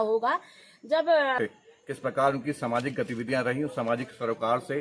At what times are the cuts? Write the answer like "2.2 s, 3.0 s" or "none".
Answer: 1.4 s